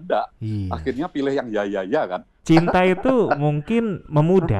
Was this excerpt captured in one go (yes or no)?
no